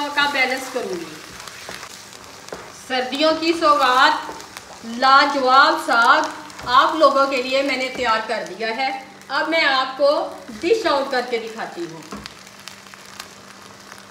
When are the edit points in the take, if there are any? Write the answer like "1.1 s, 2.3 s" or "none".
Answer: 1.9 s